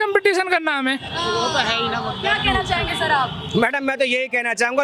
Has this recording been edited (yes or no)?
no